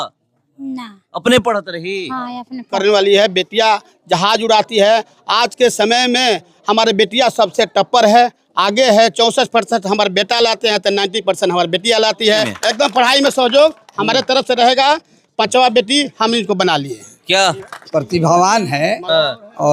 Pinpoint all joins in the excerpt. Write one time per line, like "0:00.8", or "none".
0:02.7
0:12.5
0:17.7